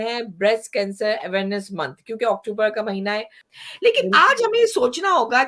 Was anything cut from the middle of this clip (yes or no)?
yes